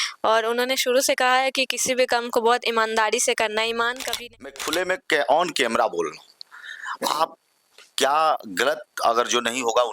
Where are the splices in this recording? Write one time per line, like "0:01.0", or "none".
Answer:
0:04.5

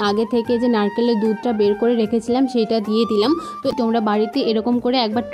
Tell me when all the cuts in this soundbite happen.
0:03.7

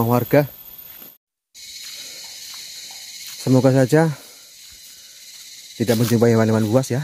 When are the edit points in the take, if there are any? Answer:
0:01.2

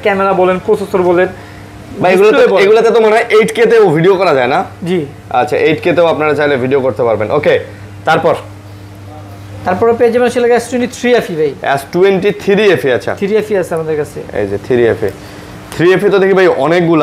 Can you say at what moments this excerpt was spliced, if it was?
none

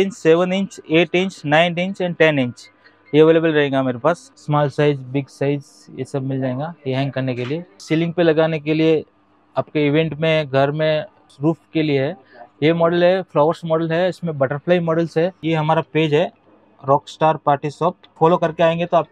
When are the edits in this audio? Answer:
0:04.3
0:07.8
0:11.3
0:15.4
0:18.1

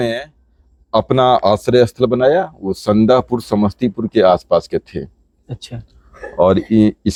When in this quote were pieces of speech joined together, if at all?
none

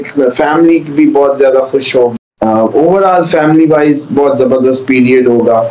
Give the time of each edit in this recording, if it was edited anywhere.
0:02.1

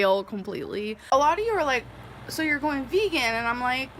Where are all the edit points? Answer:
0:01.0

